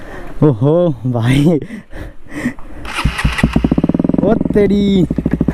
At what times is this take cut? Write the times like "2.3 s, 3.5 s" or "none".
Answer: none